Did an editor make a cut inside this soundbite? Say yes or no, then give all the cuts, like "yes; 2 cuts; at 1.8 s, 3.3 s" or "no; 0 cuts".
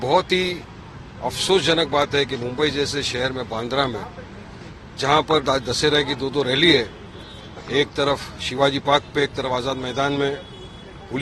no; 0 cuts